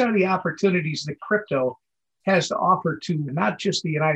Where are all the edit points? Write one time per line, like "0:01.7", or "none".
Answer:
none